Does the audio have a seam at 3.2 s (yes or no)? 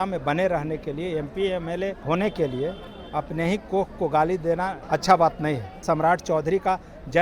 no